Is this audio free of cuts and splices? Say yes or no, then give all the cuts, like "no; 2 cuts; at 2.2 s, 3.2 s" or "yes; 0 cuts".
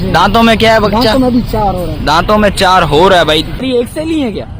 no; 1 cut; at 3.6 s